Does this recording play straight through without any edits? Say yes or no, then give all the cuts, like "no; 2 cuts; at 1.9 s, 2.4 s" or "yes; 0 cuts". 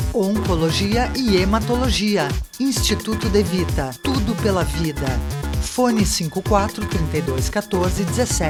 yes; 0 cuts